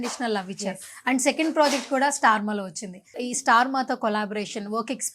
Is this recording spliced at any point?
yes; 1 cut; at 3.1 s

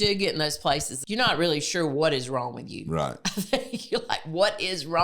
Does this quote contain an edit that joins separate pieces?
yes; 1 cut; at 0.9 s

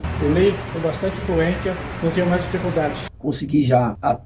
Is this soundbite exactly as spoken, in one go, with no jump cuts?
no; 1 cut; at 3.1 s

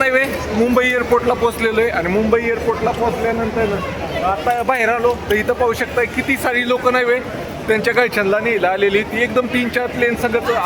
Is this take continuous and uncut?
yes; 0 cuts

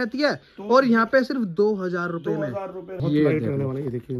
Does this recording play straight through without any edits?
no; 1 cut; at 3.0 s

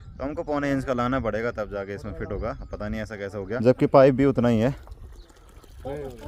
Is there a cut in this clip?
no; 0 cuts

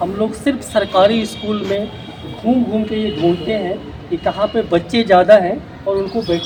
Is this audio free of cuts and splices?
yes; 0 cuts

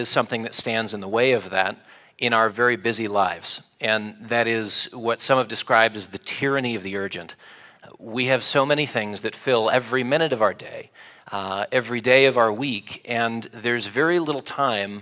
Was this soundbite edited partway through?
yes; 1 cut; at 12.4 s

